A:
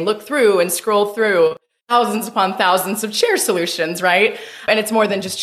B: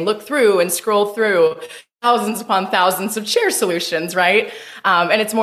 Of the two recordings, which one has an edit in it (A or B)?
A